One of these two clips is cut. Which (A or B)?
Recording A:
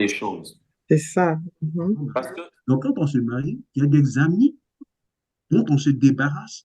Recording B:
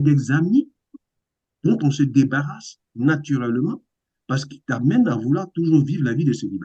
A